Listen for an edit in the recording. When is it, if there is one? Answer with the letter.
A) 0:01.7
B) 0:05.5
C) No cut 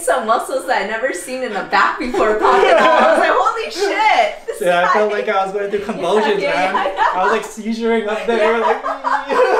C